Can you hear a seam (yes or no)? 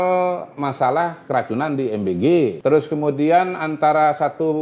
yes